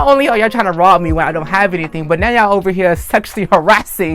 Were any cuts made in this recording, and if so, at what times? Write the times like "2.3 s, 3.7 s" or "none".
none